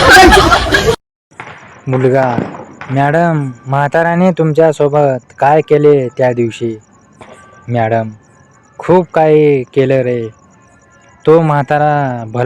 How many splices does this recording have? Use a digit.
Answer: 1